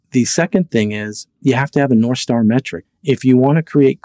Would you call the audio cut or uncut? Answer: cut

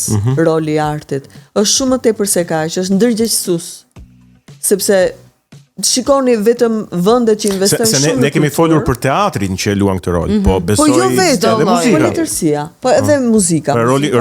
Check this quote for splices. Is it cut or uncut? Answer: uncut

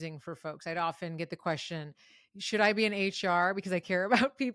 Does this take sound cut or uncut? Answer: uncut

